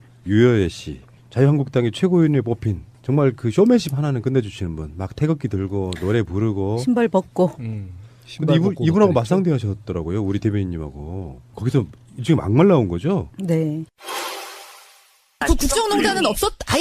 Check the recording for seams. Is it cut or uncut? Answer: uncut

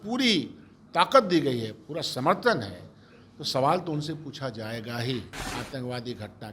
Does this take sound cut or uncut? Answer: cut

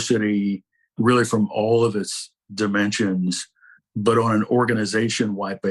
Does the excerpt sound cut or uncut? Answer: cut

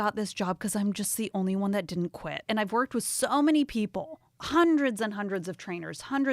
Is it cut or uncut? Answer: cut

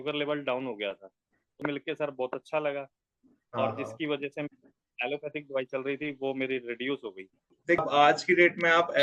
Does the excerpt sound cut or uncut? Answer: cut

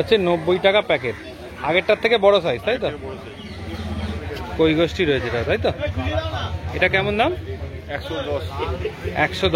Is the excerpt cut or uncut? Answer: cut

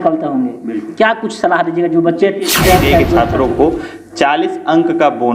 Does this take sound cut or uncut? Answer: cut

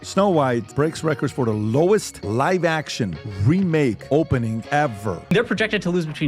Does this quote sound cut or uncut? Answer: uncut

